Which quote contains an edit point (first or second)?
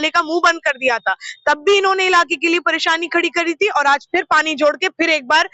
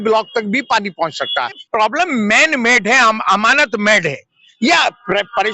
second